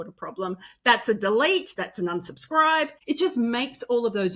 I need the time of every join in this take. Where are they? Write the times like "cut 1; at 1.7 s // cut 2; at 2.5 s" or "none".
cut 1; at 3.0 s